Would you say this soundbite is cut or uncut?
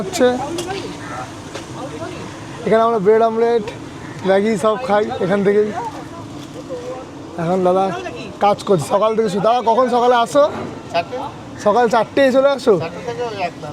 uncut